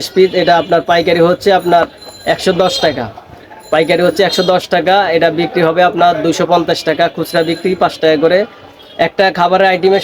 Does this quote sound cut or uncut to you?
uncut